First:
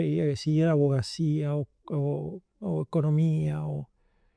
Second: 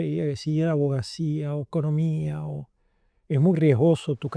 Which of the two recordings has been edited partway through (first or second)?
second